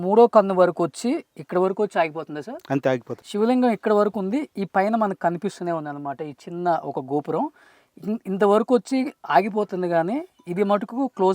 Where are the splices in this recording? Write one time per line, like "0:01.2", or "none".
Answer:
0:03.1